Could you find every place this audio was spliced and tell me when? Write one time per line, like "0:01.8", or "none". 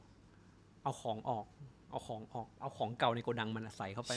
none